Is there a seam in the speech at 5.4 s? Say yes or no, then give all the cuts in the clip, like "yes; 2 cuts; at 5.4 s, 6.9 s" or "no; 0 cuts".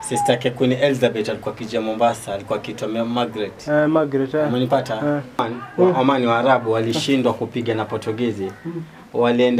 yes; 1 cut; at 5.4 s